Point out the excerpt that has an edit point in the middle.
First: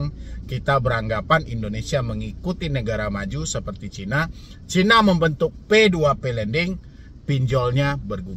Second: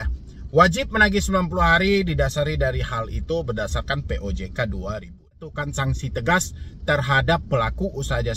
second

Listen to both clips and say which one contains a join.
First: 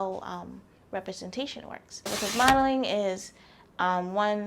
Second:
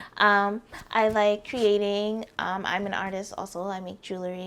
first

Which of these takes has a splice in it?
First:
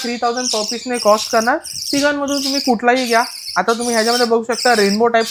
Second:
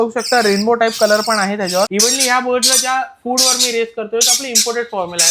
second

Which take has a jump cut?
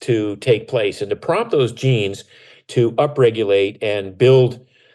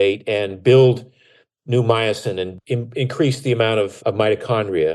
second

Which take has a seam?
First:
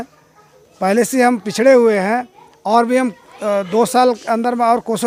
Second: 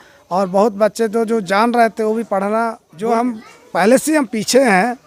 second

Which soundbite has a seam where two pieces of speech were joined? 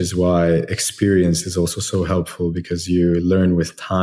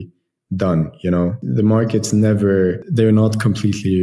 second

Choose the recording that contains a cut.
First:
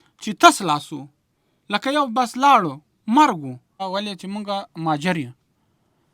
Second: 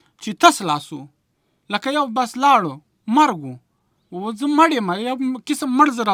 first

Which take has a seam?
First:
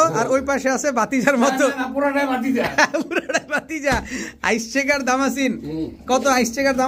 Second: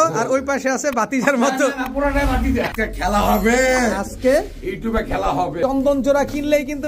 second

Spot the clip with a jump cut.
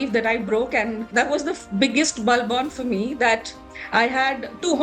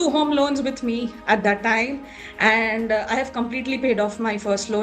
first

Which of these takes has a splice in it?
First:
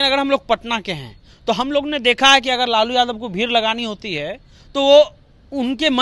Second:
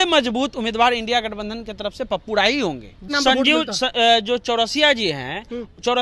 second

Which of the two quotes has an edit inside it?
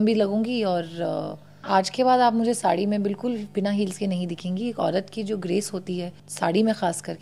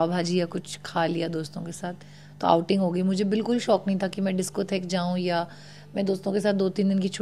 first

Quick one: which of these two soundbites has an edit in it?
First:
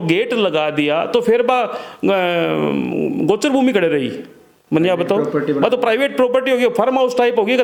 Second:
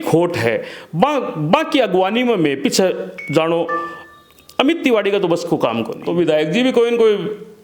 second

